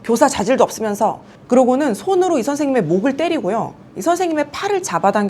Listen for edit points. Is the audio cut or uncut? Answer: cut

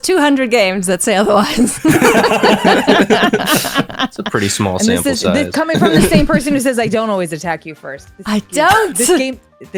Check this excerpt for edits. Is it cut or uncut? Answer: uncut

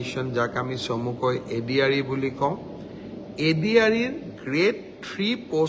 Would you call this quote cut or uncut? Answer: uncut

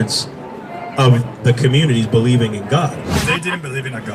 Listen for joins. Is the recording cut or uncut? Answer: cut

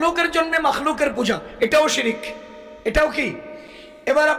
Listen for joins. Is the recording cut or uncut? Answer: uncut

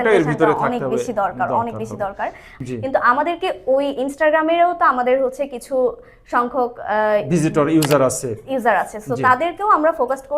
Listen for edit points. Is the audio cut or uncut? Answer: cut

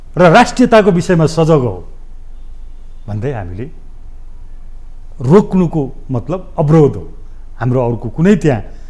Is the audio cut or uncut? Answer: uncut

